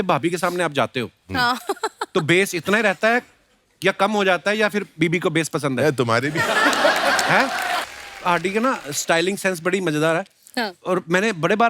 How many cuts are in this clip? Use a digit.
1